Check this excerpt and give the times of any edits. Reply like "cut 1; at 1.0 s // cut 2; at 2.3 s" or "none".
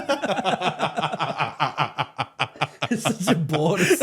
none

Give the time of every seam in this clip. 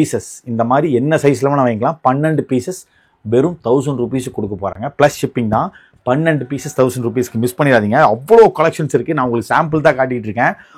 none

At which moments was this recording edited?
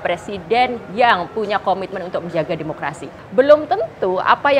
cut 1; at 3.3 s

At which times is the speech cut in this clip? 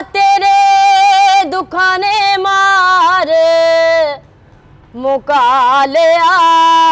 none

